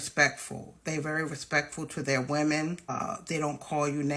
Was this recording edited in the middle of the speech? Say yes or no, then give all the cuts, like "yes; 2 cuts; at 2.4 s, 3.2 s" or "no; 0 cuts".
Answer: yes; 1 cut; at 2.9 s